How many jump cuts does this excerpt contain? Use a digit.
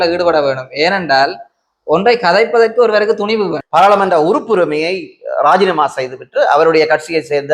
1